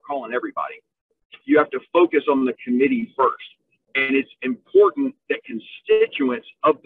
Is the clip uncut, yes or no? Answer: yes